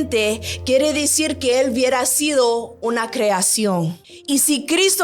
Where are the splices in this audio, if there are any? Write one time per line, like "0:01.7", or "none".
0:04.1